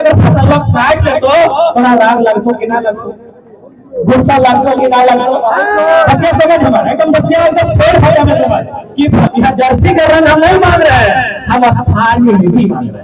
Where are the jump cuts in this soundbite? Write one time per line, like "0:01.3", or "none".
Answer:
0:09.3